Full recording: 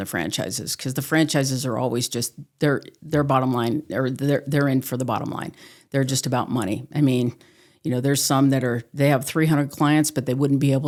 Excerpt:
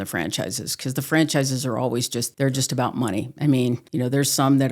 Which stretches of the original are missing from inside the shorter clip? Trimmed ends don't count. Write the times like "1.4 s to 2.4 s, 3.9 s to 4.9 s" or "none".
2.2 s to 5.8 s, 7.4 s to 7.8 s